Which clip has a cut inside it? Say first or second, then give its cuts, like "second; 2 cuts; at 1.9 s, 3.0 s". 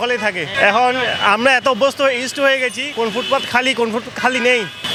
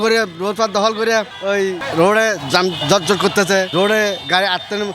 second; 1 cut; at 1.3 s